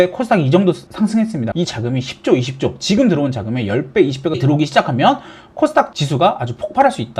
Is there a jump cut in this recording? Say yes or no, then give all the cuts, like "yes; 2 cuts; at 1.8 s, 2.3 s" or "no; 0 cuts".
yes; 2 cuts; at 1.5 s, 4.4 s